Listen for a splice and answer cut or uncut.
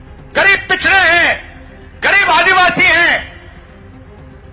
uncut